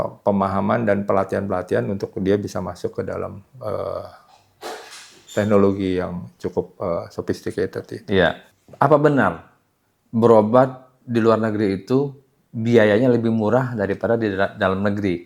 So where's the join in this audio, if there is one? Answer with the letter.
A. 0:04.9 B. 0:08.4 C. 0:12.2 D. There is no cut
B